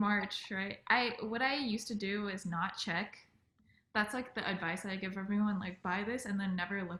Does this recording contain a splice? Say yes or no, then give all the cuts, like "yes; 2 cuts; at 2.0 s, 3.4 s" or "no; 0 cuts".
no; 0 cuts